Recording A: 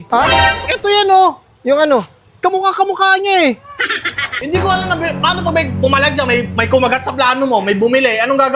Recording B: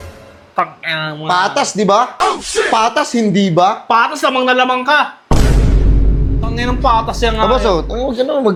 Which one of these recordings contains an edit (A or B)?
A